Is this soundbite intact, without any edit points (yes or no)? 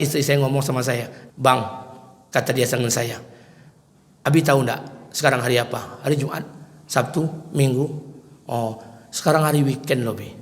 no